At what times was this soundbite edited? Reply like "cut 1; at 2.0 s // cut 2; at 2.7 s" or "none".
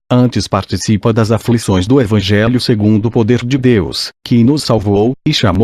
cut 1; at 3.3 s